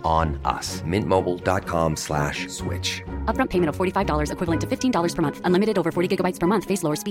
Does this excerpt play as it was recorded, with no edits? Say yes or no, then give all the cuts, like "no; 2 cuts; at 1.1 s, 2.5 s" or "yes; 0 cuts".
yes; 0 cuts